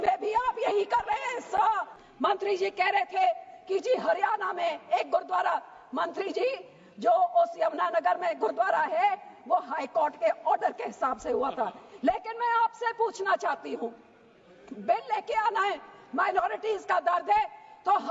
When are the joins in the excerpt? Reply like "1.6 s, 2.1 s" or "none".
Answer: 2.0 s